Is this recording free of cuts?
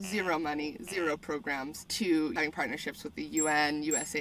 no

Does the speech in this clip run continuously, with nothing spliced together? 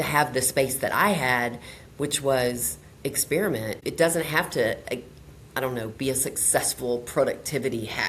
yes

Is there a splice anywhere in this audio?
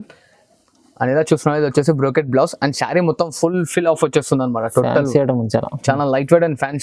no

